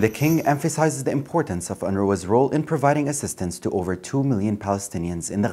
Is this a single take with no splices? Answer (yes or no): yes